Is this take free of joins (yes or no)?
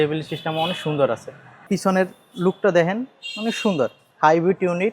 no